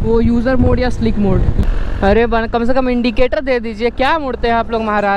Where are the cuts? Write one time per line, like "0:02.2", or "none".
0:01.5